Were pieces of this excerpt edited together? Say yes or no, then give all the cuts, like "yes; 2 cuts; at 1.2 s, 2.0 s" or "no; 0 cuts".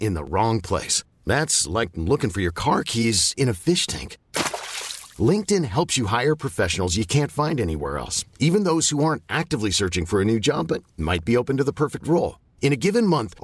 no; 0 cuts